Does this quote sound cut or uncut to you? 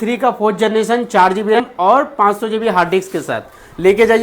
cut